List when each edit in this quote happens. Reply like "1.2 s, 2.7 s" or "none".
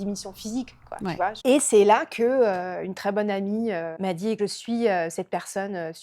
1.4 s, 3.9 s